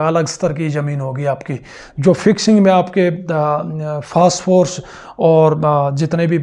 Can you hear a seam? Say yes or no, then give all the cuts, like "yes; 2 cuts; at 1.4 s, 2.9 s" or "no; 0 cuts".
no; 0 cuts